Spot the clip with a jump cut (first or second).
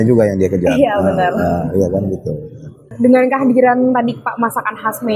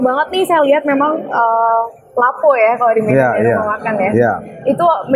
first